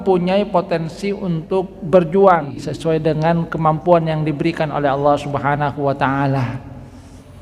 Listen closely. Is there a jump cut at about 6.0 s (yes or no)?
no